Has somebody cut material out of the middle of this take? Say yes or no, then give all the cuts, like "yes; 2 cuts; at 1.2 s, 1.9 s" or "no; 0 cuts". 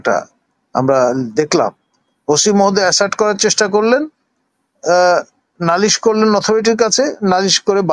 no; 0 cuts